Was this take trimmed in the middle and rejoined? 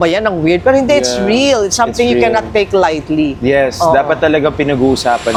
no; 0 cuts

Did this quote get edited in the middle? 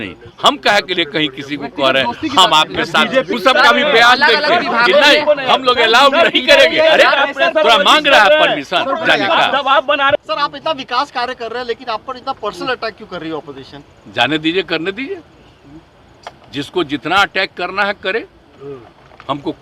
yes; 2 cuts; at 3.3 s, 10.2 s

